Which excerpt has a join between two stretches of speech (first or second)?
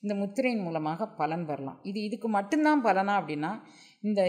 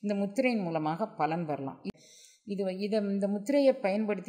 second